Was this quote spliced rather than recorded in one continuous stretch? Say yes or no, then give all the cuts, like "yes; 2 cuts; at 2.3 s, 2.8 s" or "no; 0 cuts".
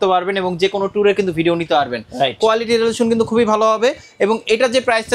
no; 0 cuts